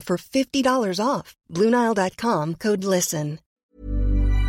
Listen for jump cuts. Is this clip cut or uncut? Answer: cut